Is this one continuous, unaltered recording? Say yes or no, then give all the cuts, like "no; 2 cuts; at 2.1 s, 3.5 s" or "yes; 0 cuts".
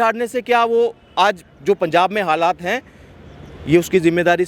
yes; 0 cuts